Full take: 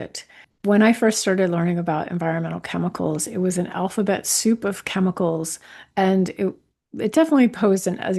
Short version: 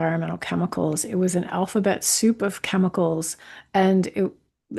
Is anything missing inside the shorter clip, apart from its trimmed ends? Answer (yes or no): no